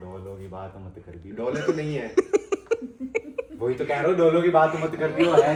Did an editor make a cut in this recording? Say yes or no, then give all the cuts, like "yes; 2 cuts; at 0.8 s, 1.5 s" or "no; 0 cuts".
no; 0 cuts